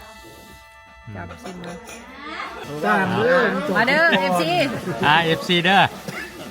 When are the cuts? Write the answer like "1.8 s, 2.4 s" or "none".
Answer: 2.7 s